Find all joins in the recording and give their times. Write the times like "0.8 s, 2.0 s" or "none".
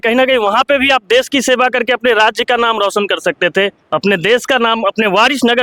none